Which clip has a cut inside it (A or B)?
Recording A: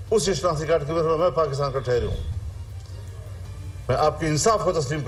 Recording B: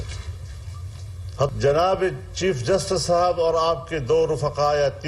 B